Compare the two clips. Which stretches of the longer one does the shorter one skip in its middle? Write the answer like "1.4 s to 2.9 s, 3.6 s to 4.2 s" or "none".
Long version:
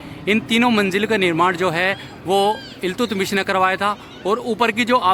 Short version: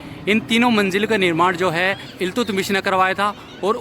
2.1 s to 2.7 s